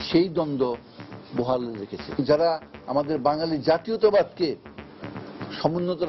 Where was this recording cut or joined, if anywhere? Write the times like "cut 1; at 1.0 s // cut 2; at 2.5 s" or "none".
cut 1; at 2.1 s